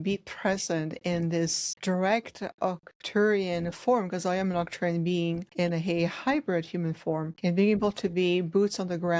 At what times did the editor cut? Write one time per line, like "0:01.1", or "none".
0:01.7
0:05.5
0:07.3